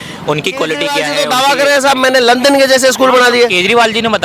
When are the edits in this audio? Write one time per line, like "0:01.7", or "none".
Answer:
0:01.0